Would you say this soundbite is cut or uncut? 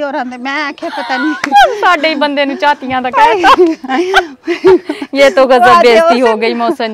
uncut